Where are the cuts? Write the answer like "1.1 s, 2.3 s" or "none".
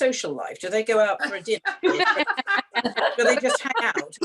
none